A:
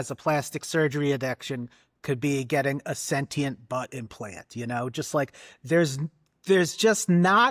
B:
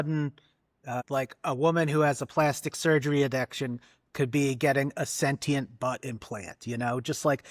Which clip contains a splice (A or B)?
B